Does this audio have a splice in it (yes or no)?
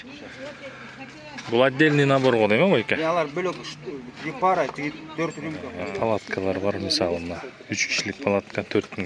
yes